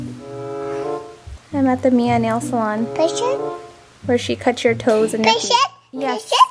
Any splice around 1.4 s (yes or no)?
yes